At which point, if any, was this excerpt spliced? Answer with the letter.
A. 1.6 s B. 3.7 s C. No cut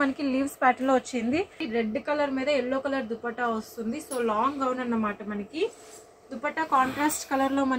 A